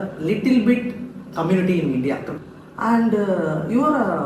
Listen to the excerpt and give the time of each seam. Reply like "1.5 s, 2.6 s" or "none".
2.3 s